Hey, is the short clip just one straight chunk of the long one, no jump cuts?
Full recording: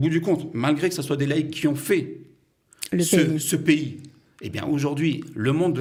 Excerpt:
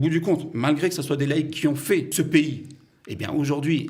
no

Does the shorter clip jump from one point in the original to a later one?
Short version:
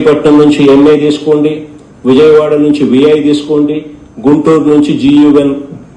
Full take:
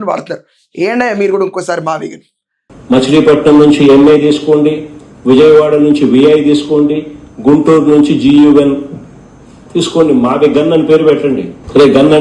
no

